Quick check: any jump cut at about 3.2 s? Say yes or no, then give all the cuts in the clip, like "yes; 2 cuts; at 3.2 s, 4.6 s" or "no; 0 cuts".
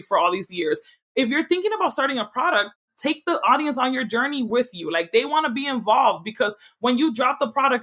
no; 0 cuts